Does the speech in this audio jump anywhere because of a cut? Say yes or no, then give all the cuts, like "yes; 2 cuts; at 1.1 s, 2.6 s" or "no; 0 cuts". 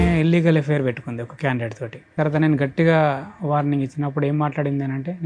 yes; 1 cut; at 2.1 s